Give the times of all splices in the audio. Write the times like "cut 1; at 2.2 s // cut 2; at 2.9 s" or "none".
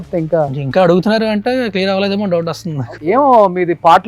cut 1; at 2.9 s

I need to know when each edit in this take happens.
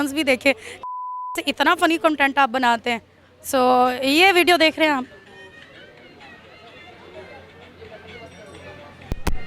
none

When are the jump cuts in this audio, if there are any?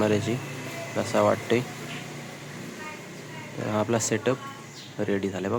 none

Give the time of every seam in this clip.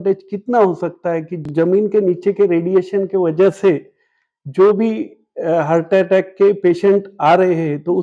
cut 1; at 1.5 s

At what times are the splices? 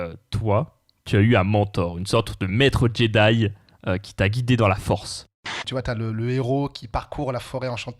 cut 1; at 5.6 s

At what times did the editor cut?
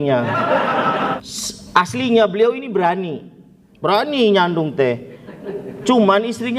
cut 1; at 1.2 s

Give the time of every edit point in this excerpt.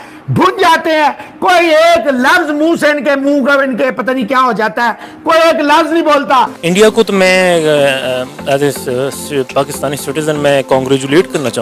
cut 1; at 6.6 s

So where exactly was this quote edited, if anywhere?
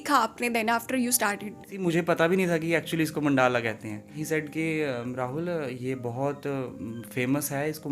cut 1; at 1.8 s // cut 2; at 4.2 s

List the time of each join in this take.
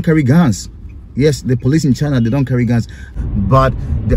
cut 1; at 3.0 s

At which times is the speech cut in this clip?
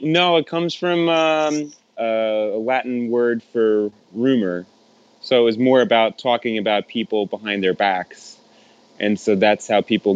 cut 1; at 1.8 s

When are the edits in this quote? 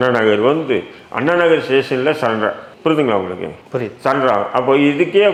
none

